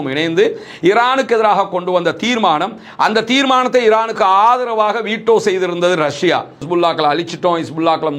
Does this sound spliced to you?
yes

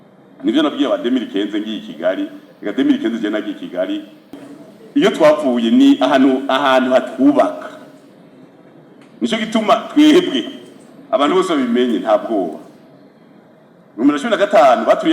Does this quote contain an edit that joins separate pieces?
yes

